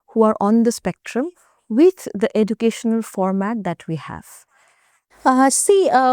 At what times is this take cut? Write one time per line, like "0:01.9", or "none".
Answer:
none